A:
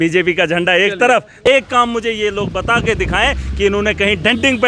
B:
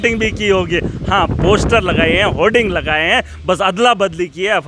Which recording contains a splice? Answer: A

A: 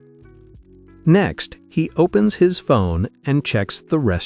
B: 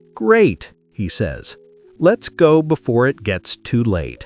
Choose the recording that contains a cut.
A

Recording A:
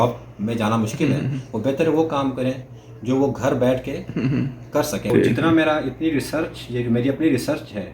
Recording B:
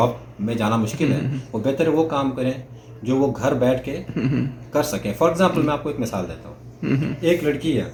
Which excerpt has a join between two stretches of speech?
A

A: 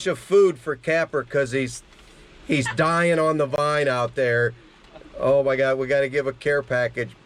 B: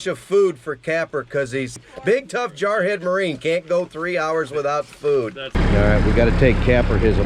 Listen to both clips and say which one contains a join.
B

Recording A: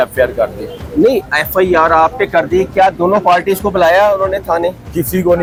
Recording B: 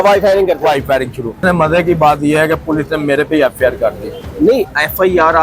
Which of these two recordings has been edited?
B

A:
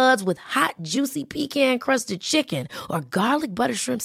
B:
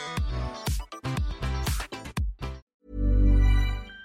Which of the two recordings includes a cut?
B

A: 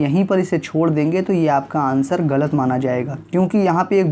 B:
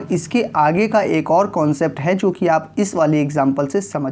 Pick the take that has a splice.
A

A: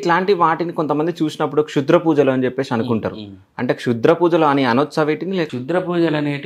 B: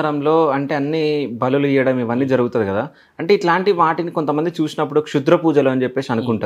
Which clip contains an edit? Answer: A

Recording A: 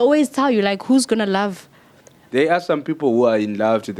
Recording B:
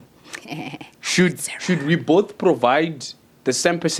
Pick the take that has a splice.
A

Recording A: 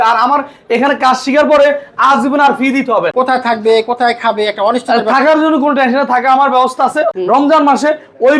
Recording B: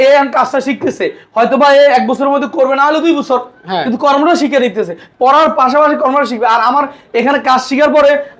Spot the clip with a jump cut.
A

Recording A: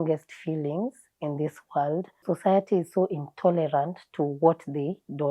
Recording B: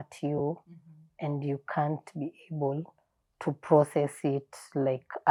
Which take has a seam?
A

